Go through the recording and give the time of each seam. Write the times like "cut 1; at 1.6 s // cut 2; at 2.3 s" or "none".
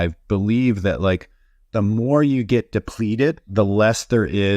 cut 1; at 3.5 s